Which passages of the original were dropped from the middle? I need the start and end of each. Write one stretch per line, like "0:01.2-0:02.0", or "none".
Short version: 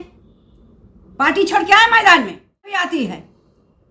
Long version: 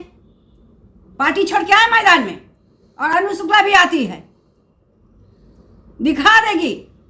0:02.7-0:03.7